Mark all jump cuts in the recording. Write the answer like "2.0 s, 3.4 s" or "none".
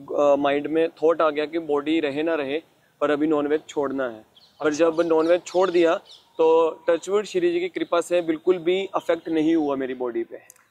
none